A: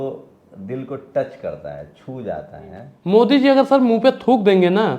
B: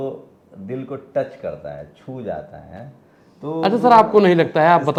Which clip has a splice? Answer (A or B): A